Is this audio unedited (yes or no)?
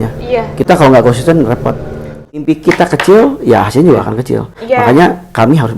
no